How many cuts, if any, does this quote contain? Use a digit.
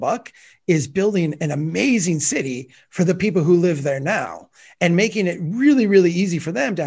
0